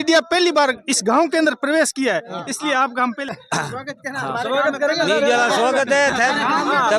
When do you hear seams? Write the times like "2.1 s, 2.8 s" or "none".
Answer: 3.3 s